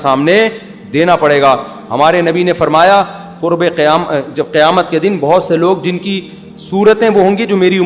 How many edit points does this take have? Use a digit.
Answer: 0